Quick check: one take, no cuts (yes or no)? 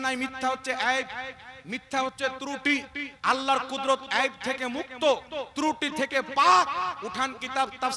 yes